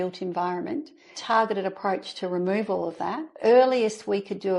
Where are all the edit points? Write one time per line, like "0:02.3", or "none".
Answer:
0:01.2
0:03.3